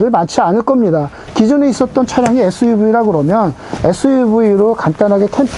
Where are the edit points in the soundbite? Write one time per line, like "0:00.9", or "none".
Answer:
0:01.2